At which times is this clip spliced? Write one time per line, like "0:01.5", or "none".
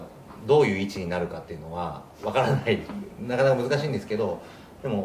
0:02.1